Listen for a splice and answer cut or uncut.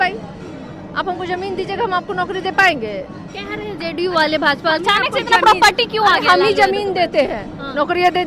uncut